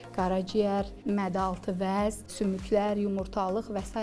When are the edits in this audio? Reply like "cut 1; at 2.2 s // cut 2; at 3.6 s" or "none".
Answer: cut 1; at 0.9 s // cut 2; at 2.3 s